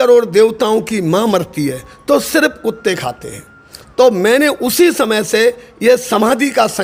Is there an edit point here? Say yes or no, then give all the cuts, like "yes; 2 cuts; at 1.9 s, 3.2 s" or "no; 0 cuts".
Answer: no; 0 cuts